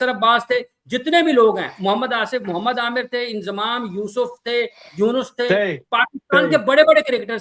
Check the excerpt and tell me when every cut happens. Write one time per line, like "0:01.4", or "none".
none